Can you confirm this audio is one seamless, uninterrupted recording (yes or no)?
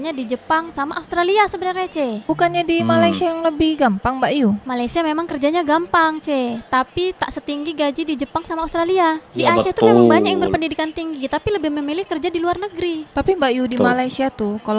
yes